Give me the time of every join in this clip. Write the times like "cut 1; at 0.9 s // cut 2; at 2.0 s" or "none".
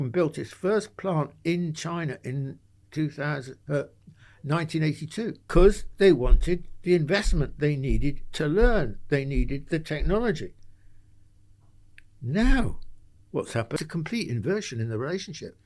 cut 1; at 5.5 s // cut 2; at 13.8 s

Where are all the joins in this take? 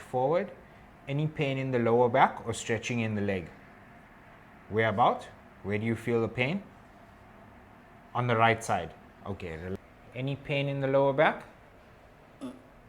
cut 1; at 9.7 s

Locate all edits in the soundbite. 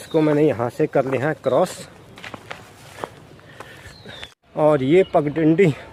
none

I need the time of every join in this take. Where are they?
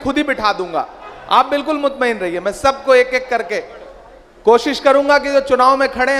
none

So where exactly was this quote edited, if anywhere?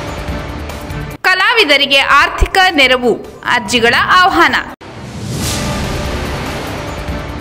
cut 1; at 1.0 s

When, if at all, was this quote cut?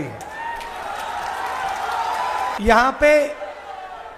cut 1; at 2.6 s

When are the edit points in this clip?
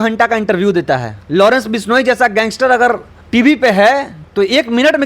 cut 1; at 1.1 s // cut 2; at 3.1 s

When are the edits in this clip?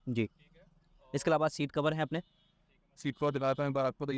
none

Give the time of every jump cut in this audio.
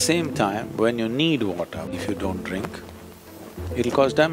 cut 1; at 1.9 s

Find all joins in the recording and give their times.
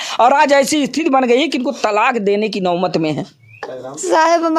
cut 1; at 3.7 s

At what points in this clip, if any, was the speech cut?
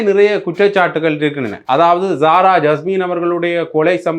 cut 1; at 1.5 s

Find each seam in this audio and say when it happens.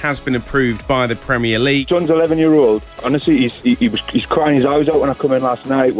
cut 1; at 1.8 s

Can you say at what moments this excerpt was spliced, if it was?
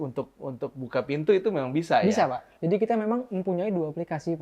cut 1; at 2.5 s

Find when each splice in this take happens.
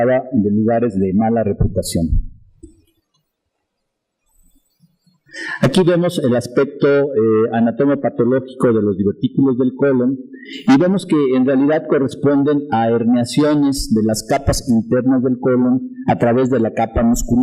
none

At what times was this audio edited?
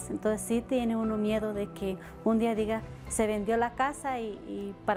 none

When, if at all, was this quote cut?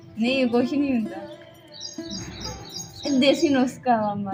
none

